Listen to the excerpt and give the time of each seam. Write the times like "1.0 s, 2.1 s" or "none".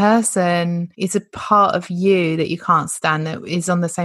0.9 s